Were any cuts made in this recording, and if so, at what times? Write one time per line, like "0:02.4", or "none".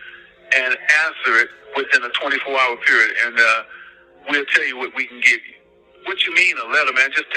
none

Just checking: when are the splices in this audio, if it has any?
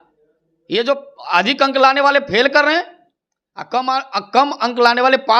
none

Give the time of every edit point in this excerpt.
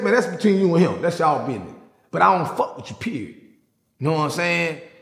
none

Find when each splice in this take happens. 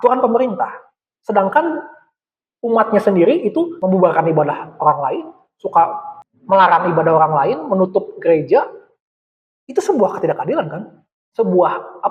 0:03.7

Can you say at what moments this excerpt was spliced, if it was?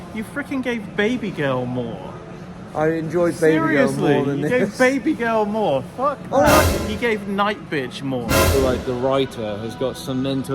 0:06.6
0:08.5

